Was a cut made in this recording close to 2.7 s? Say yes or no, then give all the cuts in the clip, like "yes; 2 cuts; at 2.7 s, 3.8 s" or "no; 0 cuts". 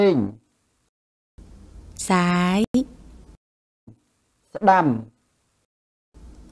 yes; 1 cut; at 2.7 s